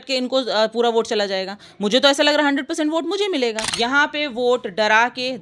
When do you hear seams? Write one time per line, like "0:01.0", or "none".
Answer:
0:03.7